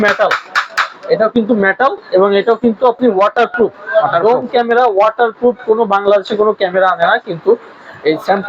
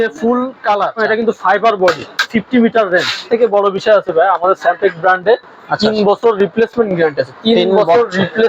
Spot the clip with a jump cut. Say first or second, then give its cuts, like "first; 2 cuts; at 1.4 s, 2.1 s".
second; 3 cuts; at 1.0 s, 2.3 s, 3.2 s